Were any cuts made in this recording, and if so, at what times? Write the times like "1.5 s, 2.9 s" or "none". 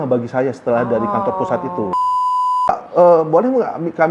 2.2 s